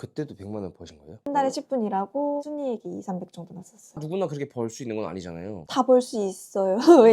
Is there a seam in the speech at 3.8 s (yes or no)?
yes